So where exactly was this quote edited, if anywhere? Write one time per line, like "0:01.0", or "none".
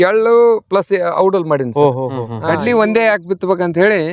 0:02.3